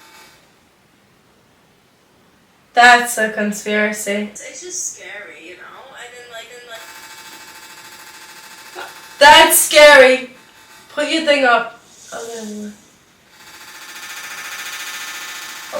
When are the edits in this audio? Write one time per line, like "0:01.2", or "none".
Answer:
0:04.3

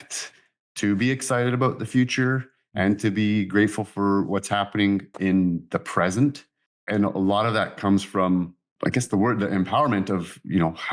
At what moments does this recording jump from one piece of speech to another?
none

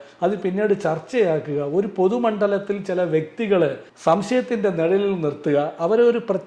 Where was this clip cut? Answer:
none

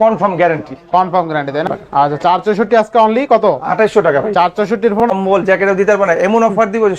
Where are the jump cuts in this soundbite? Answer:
0:01.7
0:05.1

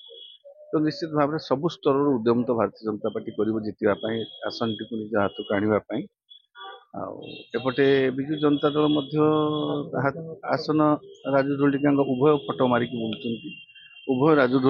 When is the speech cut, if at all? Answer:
none

